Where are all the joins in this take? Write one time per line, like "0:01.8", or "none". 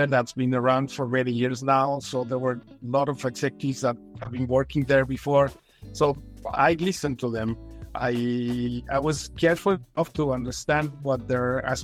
none